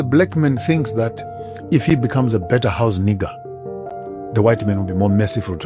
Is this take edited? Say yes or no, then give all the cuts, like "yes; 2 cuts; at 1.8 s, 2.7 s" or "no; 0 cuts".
no; 0 cuts